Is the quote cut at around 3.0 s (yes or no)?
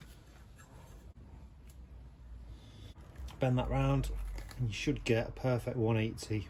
yes